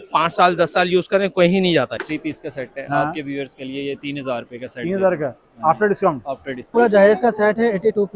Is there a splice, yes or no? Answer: yes